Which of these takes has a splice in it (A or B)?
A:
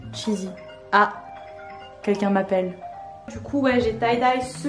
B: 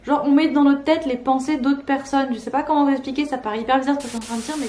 A